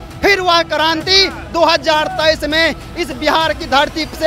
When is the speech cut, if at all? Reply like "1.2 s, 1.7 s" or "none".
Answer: none